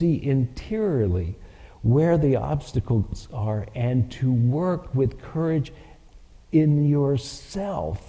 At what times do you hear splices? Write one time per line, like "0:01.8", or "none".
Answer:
none